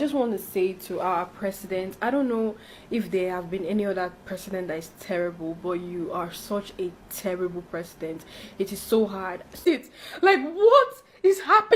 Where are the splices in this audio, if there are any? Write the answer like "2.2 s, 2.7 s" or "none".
9.6 s

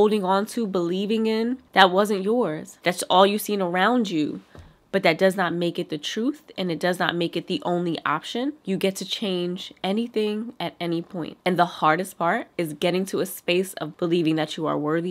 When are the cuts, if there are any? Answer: 1.6 s, 2.8 s, 8.6 s, 13.8 s

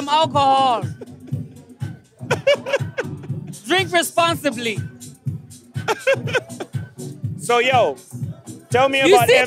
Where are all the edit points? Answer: none

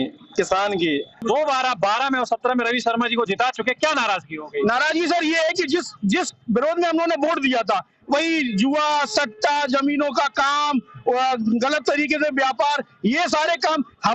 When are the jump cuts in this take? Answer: 1.2 s

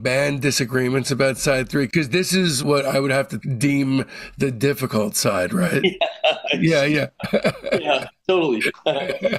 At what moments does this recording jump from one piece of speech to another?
none

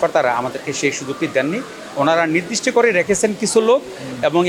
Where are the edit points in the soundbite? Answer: none

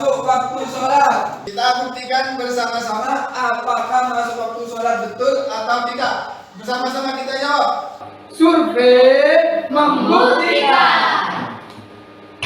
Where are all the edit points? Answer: 1.4 s

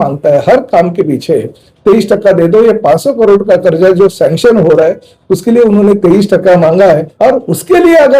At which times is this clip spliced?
7.1 s

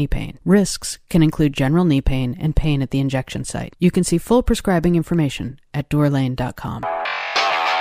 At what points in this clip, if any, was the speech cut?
6.7 s

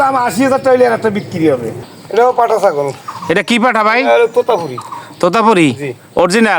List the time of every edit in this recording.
1.7 s

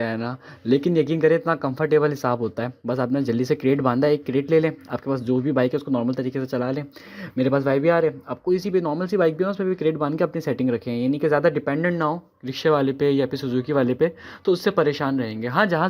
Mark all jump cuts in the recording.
none

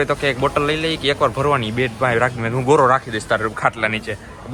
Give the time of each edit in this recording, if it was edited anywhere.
none

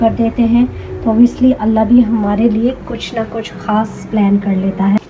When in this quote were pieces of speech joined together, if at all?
none

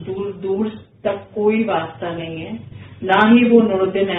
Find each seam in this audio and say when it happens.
none

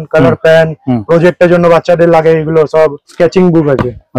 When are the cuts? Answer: 3.1 s

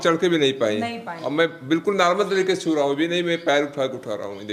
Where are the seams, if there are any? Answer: none

